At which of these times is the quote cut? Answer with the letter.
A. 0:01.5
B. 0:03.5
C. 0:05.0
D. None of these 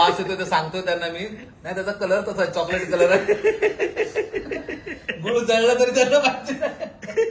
D